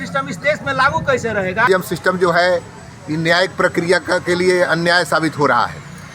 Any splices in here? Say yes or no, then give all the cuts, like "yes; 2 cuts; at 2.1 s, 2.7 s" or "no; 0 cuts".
yes; 1 cut; at 1.7 s